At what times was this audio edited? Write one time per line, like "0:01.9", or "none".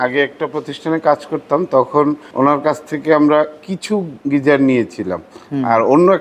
0:02.2
0:03.9